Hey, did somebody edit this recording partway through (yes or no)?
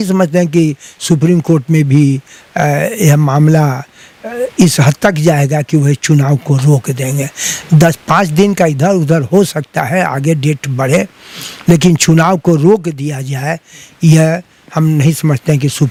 no